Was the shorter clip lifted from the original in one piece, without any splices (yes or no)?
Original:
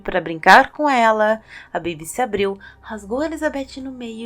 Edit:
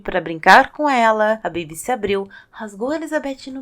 no